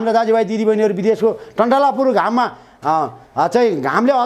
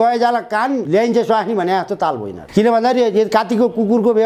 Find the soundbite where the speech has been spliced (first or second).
second